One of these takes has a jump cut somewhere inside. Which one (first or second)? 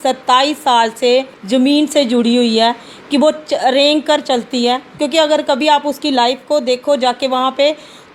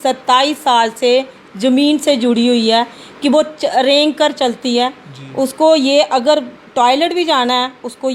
first